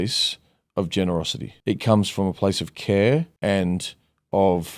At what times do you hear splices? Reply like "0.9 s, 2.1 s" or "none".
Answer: 1.4 s, 3.3 s